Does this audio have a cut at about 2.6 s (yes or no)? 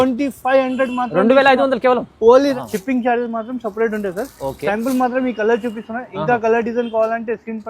yes